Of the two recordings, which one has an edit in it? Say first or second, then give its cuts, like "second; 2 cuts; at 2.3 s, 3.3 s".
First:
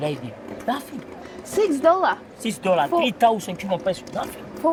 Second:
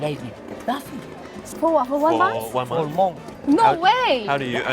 second; 2 cuts; at 1.4 s, 3.3 s